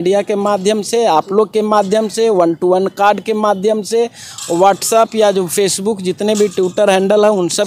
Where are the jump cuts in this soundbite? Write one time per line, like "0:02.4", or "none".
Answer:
none